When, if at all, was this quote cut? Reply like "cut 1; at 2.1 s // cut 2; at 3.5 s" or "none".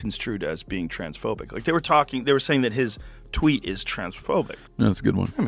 cut 1; at 4.6 s